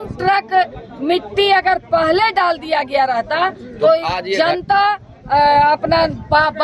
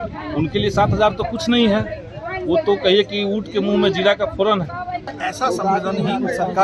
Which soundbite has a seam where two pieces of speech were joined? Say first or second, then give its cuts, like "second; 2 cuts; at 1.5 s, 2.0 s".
second; 1 cut; at 5.2 s